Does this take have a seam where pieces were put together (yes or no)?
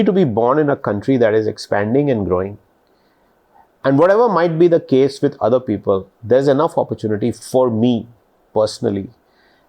no